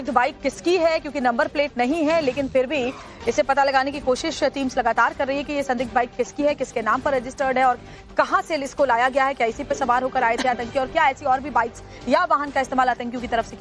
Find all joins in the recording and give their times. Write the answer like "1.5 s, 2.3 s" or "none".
5.5 s

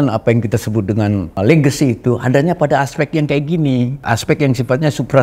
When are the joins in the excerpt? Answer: 1.4 s, 4.0 s

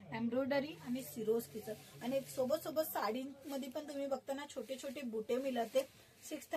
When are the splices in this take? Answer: none

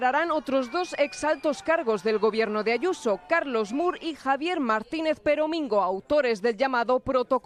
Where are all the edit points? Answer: none

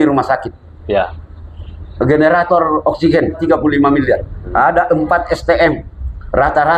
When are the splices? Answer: 3.4 s, 4.5 s

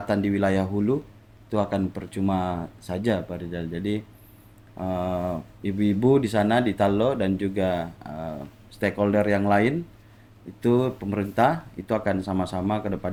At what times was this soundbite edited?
none

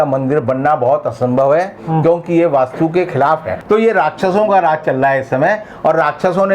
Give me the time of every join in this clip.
3.5 s

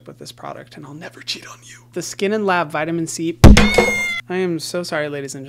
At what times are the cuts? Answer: 1.9 s

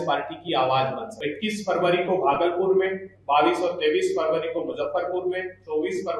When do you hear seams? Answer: 1.1 s

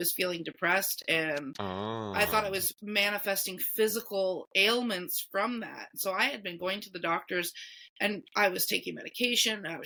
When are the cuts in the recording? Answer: none

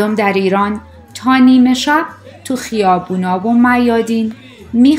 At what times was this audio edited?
none

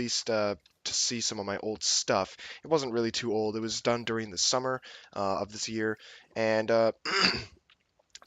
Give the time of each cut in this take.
4.4 s

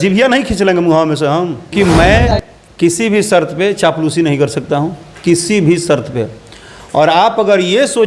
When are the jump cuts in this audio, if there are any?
1.7 s

